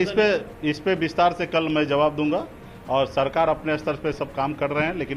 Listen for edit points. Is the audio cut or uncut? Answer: uncut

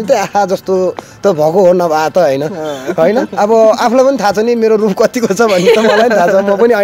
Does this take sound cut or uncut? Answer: uncut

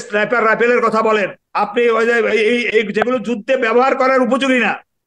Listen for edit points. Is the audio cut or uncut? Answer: cut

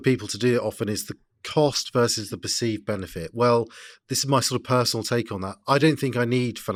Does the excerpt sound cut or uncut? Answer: uncut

